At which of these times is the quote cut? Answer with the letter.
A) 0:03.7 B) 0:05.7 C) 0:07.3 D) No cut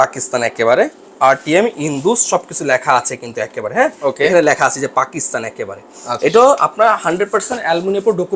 D